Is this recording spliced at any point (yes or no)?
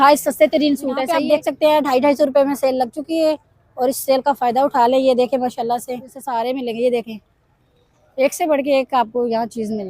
yes